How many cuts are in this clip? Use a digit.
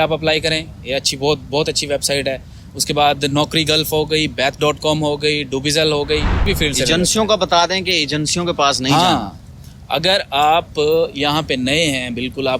1